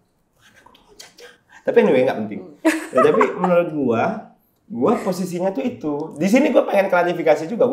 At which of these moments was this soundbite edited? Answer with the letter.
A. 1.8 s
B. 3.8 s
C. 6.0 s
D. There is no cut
D